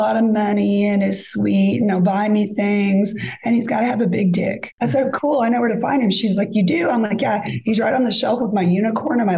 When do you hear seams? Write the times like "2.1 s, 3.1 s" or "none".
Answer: 4.7 s